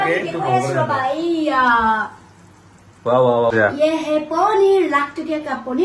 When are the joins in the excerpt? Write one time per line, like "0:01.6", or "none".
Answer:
0:03.5